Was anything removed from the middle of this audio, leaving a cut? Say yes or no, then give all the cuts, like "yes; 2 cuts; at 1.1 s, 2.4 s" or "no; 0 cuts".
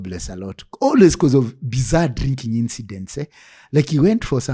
no; 0 cuts